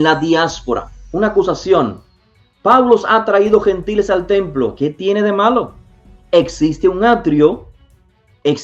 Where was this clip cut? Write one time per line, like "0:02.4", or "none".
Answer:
0:01.0
0:04.7